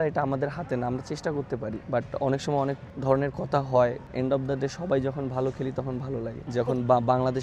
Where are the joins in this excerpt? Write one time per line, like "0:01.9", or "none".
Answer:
0:01.8
0:02.9
0:04.1
0:06.4